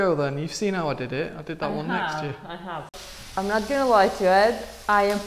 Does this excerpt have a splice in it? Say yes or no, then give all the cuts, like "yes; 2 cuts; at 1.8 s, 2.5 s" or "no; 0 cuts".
yes; 1 cut; at 2.9 s